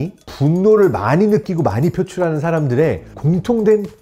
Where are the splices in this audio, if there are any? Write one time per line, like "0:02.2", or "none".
none